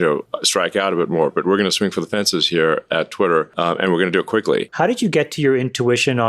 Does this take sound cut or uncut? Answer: cut